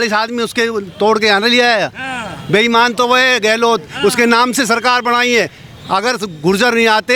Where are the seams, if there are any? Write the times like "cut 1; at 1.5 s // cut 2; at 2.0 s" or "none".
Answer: none